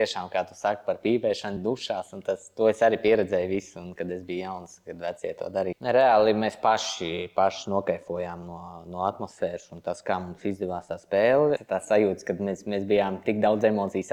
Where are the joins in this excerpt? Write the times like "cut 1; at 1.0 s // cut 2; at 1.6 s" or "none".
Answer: cut 1; at 1.6 s // cut 2; at 5.8 s // cut 3; at 11.6 s